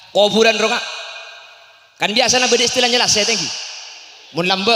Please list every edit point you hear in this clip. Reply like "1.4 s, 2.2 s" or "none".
none